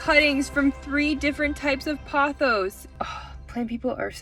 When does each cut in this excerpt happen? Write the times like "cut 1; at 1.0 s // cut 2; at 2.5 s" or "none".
none